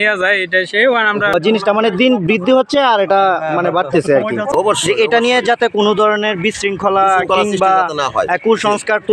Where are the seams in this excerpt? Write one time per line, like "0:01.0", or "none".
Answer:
0:01.3
0:04.5